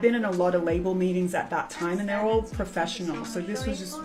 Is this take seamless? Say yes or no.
yes